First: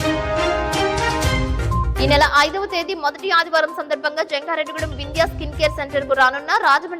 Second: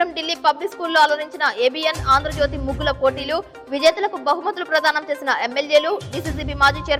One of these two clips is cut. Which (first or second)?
first